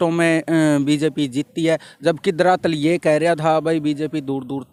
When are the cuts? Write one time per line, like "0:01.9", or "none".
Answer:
none